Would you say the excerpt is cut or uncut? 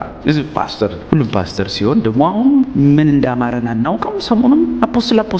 cut